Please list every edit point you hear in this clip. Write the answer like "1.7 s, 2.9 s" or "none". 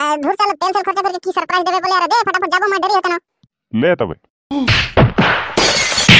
4.5 s